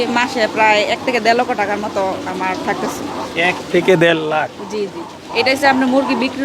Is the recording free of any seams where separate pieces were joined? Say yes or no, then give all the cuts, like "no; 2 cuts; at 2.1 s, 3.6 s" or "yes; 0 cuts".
yes; 0 cuts